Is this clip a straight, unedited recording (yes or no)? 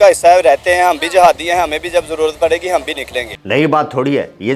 yes